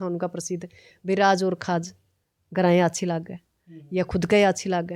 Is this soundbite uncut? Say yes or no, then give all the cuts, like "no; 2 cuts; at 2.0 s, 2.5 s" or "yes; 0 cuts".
yes; 0 cuts